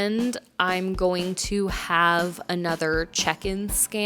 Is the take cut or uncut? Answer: uncut